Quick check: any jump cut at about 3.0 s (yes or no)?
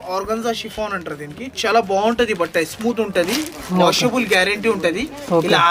no